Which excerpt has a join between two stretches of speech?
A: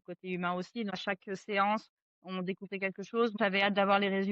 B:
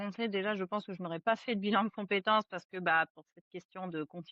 A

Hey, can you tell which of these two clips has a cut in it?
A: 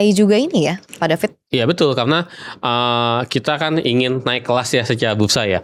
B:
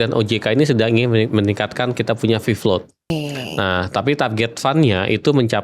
B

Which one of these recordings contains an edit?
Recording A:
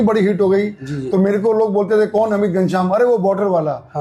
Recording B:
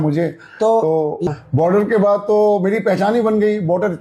B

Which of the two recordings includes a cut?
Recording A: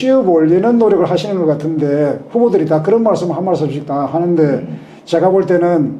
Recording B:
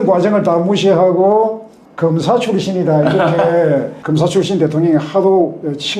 B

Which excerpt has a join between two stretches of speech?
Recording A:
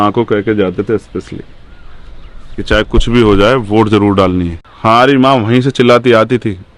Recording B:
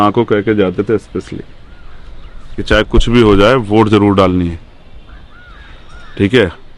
A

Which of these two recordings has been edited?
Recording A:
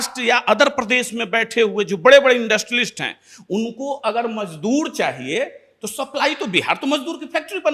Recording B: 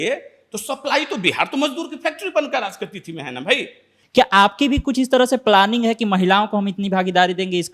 B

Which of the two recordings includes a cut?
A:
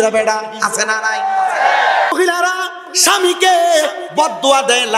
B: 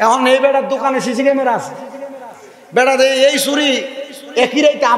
A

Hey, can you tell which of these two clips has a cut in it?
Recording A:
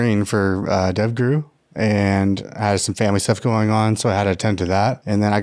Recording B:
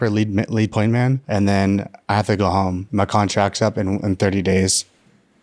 B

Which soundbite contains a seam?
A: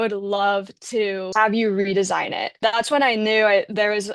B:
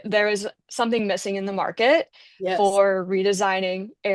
A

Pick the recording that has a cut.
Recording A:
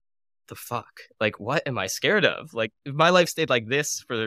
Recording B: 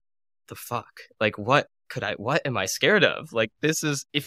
A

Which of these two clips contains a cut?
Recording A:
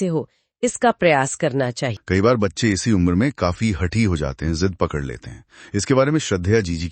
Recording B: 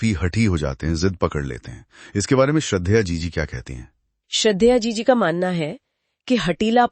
A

